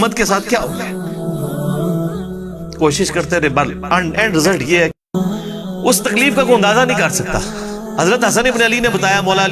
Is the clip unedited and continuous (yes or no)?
no